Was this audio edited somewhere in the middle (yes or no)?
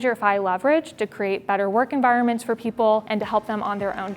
yes